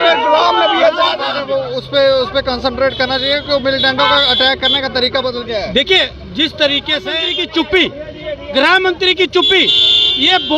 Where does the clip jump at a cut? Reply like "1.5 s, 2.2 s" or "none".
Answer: 1.4 s, 7.3 s